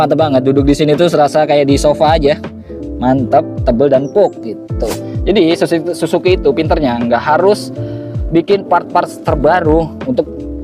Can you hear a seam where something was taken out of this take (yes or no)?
yes